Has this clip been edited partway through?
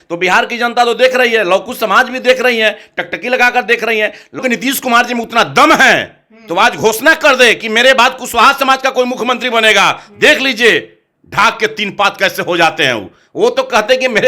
yes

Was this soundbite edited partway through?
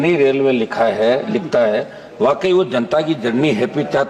no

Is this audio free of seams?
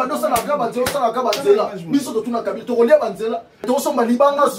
no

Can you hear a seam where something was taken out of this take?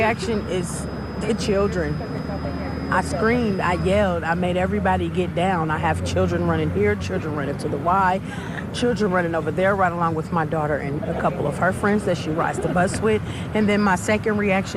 no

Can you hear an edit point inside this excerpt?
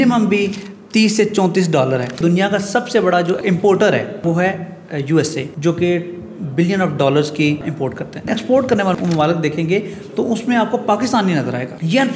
yes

